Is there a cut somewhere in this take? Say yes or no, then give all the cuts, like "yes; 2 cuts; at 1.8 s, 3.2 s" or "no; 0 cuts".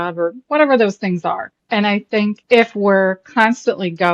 yes; 2 cuts; at 1.5 s, 2.4 s